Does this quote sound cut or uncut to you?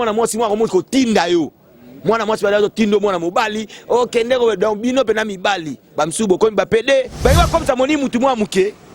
cut